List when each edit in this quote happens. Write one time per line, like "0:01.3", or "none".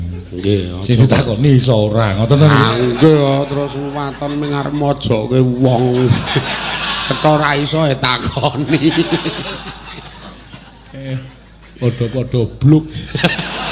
none

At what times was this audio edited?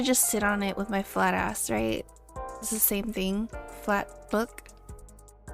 0:03.0

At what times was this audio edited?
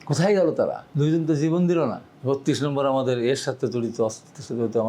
0:00.8
0:02.1

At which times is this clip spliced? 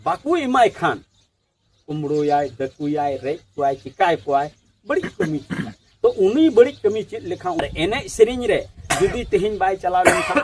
0:07.6

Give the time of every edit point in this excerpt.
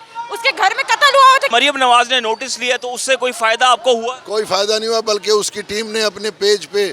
0:01.5

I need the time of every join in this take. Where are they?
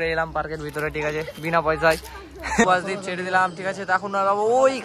0:02.6

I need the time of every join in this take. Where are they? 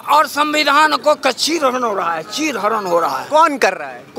none

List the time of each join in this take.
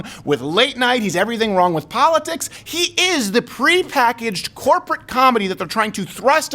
0:02.6

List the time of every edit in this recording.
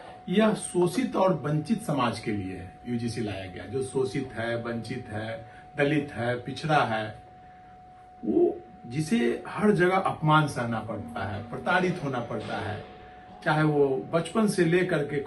none

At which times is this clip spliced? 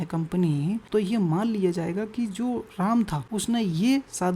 0:00.8
0:03.2

